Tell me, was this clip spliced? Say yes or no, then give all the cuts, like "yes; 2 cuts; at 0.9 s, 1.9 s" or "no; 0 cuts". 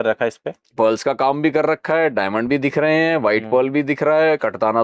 no; 0 cuts